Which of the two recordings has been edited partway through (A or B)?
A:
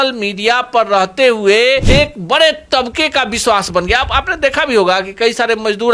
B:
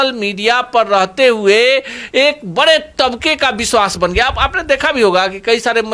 A